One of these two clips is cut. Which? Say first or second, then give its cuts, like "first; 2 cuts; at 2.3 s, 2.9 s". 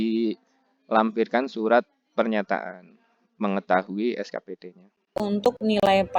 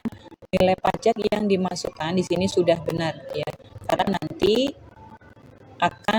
first; 1 cut; at 5.2 s